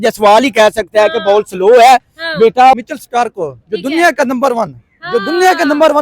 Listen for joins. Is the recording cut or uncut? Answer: cut